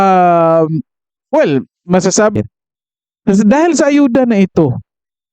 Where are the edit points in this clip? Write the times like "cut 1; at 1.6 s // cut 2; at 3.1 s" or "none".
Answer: cut 1; at 2.3 s